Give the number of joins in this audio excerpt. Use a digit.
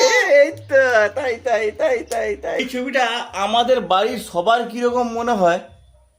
1